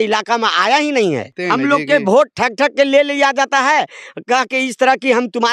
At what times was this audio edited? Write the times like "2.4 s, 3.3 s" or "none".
none